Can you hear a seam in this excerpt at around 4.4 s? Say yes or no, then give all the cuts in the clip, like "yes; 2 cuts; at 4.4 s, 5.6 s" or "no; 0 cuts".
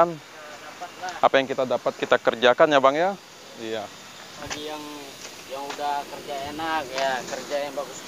yes; 1 cut; at 4.4 s